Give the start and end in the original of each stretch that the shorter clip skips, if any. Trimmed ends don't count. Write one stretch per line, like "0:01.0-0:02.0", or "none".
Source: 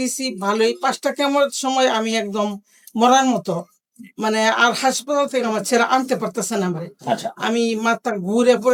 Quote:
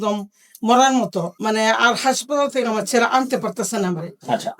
0:03.7-0:04.1